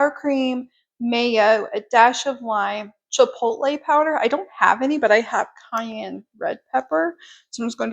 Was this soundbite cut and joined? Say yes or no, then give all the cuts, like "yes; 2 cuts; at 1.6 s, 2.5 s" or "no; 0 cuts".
no; 0 cuts